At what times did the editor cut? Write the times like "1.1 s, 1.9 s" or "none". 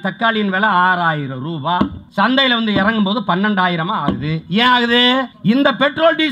2.0 s, 5.3 s